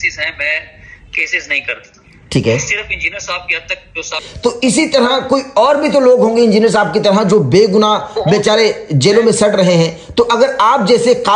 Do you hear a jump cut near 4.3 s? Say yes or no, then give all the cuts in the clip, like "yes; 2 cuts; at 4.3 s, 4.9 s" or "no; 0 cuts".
yes; 1 cut; at 4.3 s